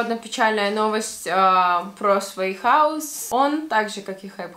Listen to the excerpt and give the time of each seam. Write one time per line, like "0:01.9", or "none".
0:03.1